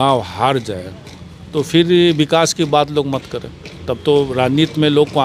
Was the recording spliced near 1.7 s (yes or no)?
no